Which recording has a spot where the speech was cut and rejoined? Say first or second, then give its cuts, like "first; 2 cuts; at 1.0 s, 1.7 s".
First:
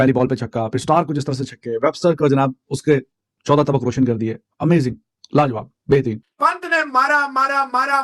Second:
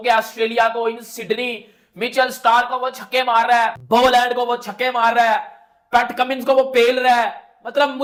first; 1 cut; at 6.2 s